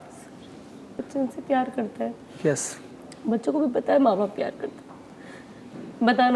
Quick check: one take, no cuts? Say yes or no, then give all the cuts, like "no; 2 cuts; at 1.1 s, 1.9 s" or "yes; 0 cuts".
no; 1 cut; at 0.9 s